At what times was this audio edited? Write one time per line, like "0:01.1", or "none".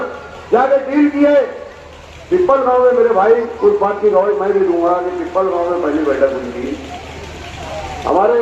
none